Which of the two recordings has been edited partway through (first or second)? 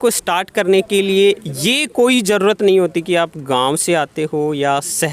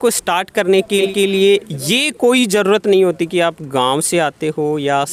first